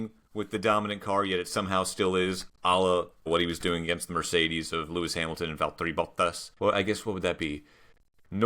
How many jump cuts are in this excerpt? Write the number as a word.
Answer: two